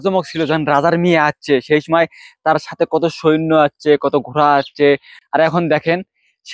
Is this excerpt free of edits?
no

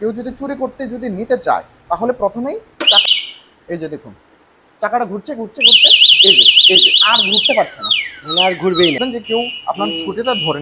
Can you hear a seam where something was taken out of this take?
yes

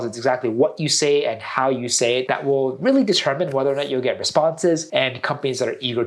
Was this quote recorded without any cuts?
no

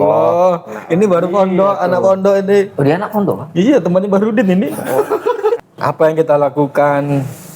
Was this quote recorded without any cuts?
no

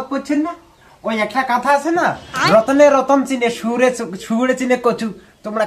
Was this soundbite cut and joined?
no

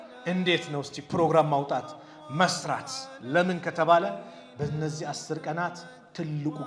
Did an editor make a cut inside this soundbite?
no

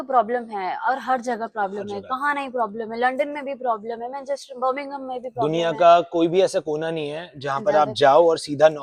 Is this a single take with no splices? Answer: yes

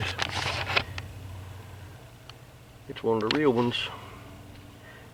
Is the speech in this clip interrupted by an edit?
no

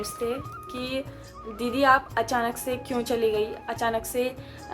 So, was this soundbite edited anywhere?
no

